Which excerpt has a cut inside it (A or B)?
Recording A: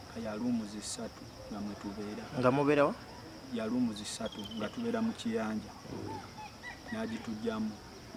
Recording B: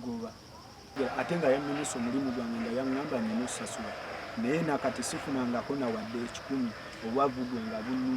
B